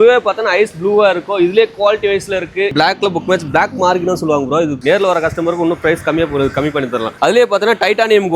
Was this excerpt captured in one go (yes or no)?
no